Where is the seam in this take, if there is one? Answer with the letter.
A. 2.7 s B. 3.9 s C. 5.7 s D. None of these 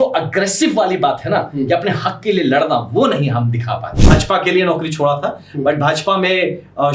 B